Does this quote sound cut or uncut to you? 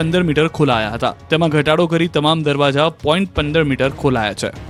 uncut